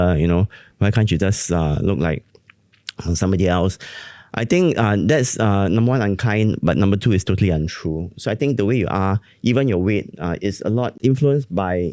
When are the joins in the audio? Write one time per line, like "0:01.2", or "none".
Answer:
0:10.9